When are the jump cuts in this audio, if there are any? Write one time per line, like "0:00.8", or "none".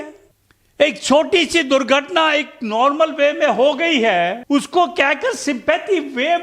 none